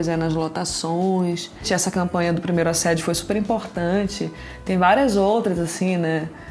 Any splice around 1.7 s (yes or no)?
yes